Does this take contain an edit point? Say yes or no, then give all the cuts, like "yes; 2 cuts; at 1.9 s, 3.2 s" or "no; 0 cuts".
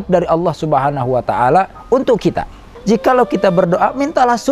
yes; 1 cut; at 2.7 s